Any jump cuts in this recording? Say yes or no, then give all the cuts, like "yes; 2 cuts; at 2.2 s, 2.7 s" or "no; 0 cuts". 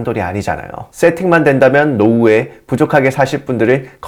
no; 0 cuts